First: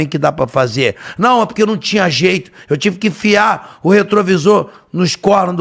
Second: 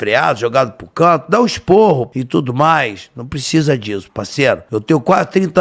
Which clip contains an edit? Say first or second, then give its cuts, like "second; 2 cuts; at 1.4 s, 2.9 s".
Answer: second; 2 cuts; at 2.1 s, 4.6 s